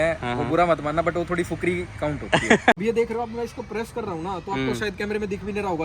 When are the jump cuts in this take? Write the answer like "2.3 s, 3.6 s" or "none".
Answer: 2.8 s